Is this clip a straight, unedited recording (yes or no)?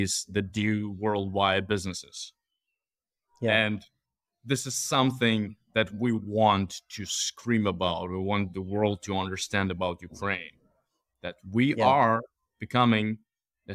yes